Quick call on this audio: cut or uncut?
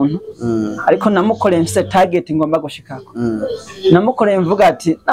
uncut